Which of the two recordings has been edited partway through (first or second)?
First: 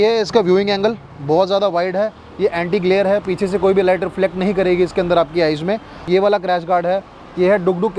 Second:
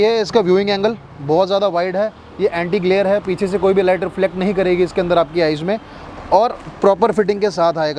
first